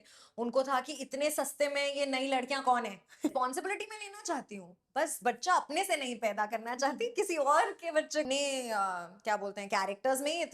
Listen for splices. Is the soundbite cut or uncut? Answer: cut